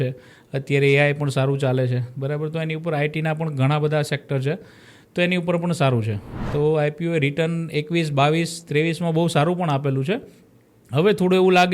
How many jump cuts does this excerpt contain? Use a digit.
1